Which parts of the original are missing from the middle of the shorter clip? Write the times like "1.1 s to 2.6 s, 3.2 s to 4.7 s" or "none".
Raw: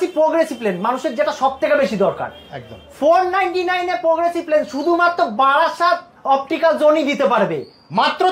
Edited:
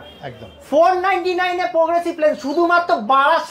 none